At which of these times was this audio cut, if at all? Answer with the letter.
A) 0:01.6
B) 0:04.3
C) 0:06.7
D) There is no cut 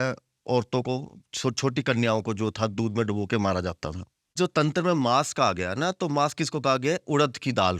B